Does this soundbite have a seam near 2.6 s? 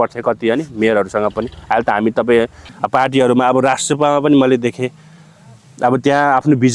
yes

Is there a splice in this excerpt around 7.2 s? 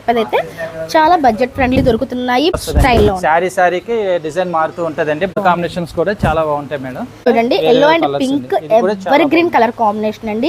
yes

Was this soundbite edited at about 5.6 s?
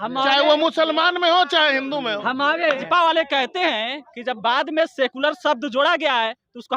no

